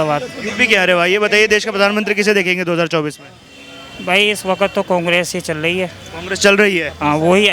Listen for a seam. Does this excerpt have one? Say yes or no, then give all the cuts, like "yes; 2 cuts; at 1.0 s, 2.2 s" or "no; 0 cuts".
no; 0 cuts